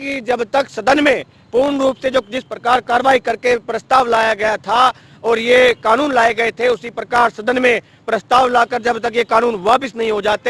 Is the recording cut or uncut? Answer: uncut